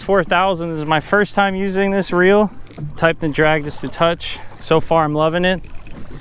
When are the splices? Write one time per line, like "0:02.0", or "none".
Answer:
none